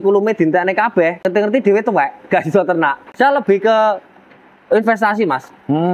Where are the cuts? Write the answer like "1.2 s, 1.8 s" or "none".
1.2 s, 3.0 s